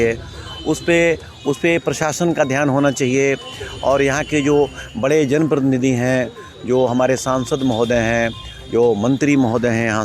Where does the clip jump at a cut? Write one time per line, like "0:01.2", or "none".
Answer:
none